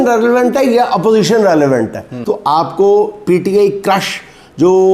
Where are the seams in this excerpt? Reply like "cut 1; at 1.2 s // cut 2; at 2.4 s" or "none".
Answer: cut 1; at 2.1 s